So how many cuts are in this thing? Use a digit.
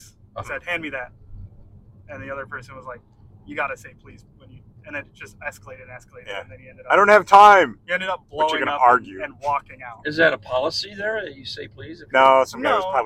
0